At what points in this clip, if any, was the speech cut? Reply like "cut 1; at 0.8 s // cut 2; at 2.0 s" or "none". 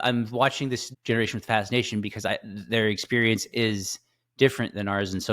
cut 1; at 0.9 s